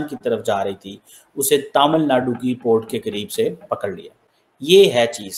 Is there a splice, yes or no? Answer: yes